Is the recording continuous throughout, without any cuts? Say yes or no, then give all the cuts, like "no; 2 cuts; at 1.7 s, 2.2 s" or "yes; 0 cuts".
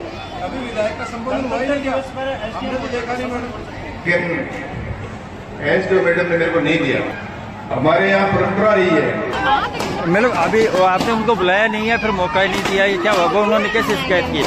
no; 2 cuts; at 4.0 s, 9.4 s